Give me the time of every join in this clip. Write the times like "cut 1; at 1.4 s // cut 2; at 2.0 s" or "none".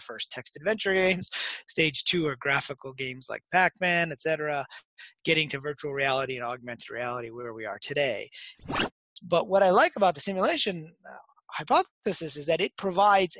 cut 1; at 8.7 s

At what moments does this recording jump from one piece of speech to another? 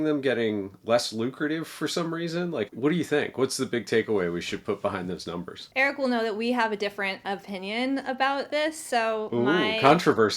cut 1; at 2.7 s // cut 2; at 5.6 s // cut 3; at 8.5 s

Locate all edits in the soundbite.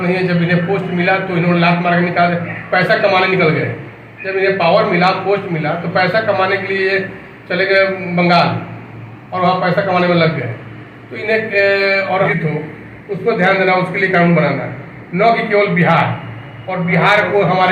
cut 1; at 12.3 s

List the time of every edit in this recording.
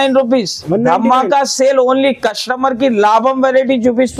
none

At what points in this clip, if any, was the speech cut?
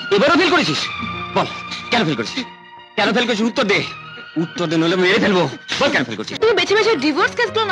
cut 1; at 6.2 s

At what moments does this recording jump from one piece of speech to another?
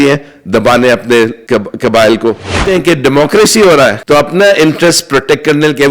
cut 1; at 1.4 s // cut 2; at 2.6 s // cut 3; at 4.0 s

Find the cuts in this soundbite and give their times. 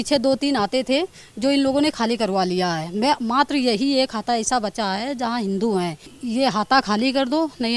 cut 1; at 6.1 s

